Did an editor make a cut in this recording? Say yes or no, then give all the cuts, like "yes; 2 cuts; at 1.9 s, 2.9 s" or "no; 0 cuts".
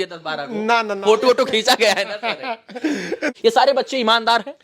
yes; 1 cut; at 3.3 s